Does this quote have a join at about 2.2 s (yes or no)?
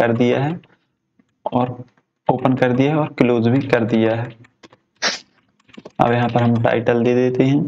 no